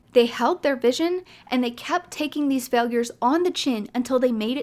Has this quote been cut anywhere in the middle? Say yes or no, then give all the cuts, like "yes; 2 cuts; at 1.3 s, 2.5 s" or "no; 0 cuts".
no; 0 cuts